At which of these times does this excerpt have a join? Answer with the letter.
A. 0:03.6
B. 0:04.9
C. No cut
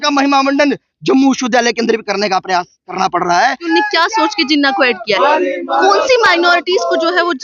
A